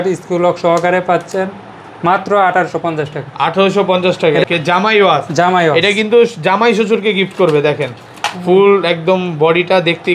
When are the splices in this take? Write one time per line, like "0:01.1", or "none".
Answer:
0:04.4